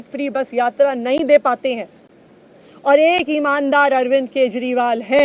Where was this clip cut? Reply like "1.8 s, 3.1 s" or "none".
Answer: none